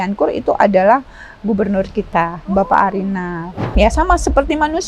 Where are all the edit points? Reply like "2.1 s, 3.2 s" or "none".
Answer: 3.7 s